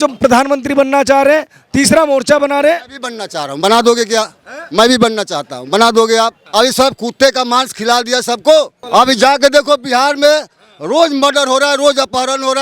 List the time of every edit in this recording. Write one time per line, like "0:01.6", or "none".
0:06.4
0:08.8